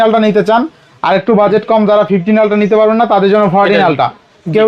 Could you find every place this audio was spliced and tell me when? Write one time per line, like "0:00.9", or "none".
none